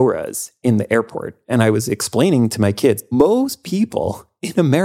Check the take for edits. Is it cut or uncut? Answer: cut